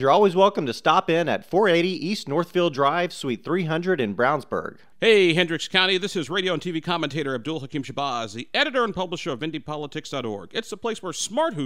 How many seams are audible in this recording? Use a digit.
1